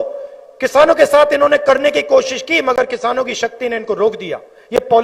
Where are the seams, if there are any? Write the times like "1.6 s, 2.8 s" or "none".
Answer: none